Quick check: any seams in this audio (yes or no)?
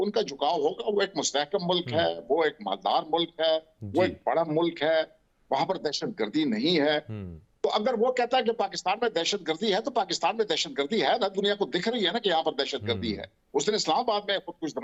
no